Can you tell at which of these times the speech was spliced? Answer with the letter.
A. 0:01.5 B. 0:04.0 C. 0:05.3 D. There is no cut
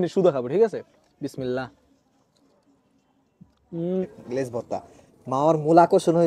B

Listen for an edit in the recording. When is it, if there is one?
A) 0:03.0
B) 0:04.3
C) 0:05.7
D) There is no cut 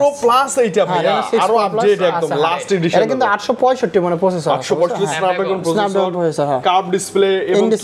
D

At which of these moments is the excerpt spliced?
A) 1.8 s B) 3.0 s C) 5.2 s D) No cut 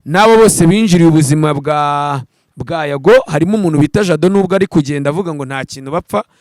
D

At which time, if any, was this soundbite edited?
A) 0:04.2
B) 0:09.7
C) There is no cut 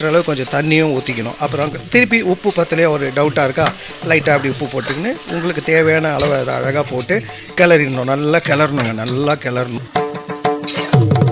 B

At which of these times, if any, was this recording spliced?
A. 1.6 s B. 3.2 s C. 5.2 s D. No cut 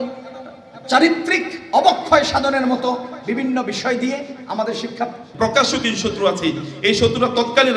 C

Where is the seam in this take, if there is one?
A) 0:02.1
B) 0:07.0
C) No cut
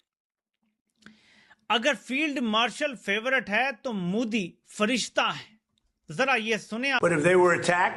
B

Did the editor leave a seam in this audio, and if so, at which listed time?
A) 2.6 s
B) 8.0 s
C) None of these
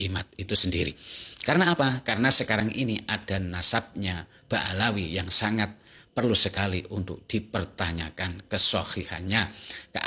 C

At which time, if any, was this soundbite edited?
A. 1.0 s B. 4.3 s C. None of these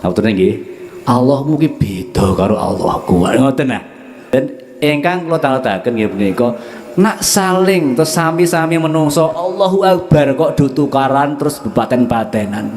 B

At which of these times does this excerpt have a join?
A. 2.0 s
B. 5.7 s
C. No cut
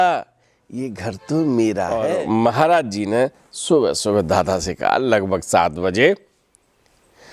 A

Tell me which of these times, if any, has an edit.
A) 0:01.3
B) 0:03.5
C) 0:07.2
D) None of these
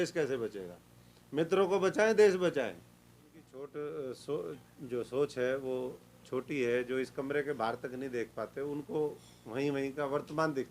B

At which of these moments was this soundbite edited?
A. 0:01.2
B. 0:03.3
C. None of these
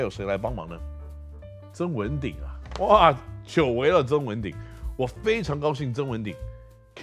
C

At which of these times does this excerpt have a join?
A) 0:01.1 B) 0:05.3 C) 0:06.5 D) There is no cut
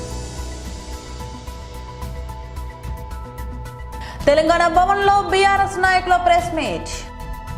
D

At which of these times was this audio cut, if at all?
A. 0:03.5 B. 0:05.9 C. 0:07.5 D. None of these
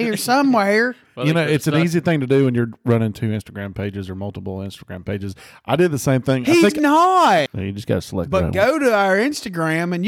C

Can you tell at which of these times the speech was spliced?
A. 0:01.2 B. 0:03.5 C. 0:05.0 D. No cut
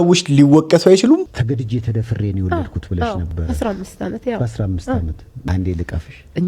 A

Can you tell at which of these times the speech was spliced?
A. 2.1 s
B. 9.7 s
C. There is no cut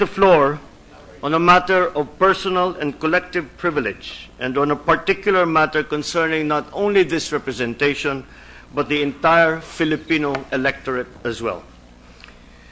B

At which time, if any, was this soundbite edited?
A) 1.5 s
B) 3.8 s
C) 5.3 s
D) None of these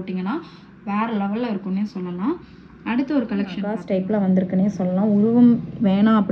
B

